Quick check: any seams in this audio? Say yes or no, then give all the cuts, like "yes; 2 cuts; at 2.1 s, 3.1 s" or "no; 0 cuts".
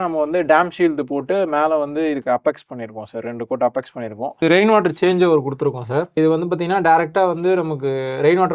yes; 2 cuts; at 4.3 s, 6.2 s